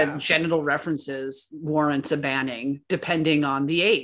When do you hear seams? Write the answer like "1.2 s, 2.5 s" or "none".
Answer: none